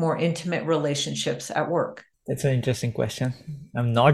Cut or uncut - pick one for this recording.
cut